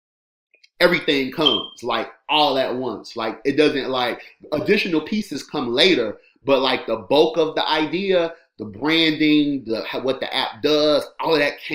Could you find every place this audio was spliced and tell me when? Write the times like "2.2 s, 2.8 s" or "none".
none